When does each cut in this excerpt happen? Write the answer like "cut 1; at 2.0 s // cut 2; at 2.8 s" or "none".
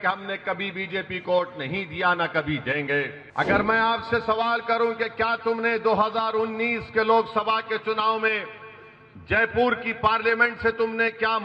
cut 1; at 3.2 s